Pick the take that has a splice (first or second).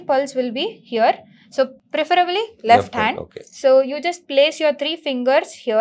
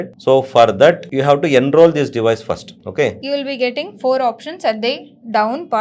second